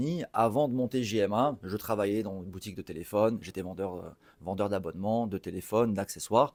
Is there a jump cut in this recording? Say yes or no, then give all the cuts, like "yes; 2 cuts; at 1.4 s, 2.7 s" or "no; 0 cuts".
no; 0 cuts